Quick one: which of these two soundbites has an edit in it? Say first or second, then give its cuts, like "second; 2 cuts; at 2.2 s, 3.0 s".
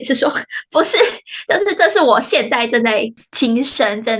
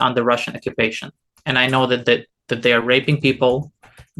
first; 1 cut; at 3.2 s